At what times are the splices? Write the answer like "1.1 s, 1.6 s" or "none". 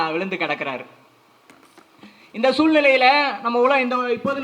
none